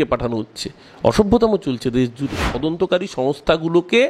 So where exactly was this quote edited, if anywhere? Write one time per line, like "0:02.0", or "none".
0:02.5